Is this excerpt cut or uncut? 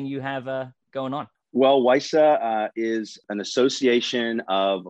cut